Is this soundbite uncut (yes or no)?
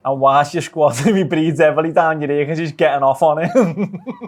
yes